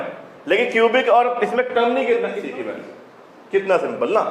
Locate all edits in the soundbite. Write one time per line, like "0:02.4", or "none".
0:02.3

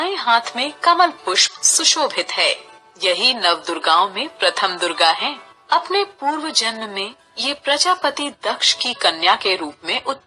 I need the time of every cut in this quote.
none

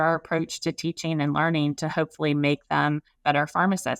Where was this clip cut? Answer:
0:03.1

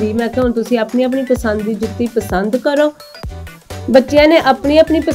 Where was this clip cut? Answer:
0:03.2

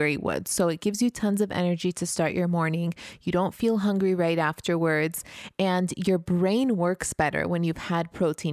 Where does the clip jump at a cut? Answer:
0:06.2

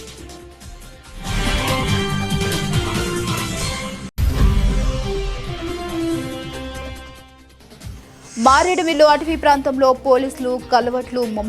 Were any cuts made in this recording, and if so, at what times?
0:01.8
0:04.1
0:06.8
0:08.3

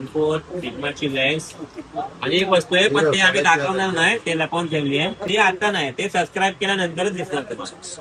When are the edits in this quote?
0:05.2

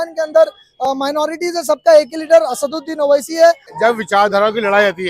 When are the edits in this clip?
0:03.7

